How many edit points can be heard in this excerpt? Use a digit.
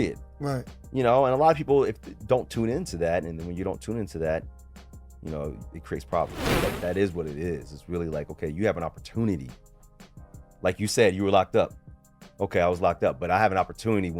1